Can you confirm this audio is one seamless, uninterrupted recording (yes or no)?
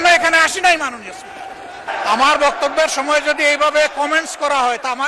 no